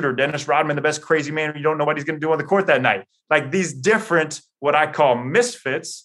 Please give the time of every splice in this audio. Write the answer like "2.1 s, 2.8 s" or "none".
1.8 s